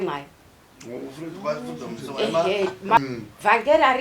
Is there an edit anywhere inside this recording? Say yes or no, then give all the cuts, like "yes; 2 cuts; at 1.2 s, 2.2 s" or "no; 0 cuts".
yes; 1 cut; at 3.0 s